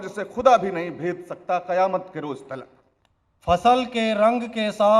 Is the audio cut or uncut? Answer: cut